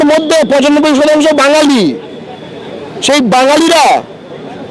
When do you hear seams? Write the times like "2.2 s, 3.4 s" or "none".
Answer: none